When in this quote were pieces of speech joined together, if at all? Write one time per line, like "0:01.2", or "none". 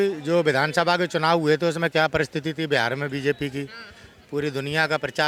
none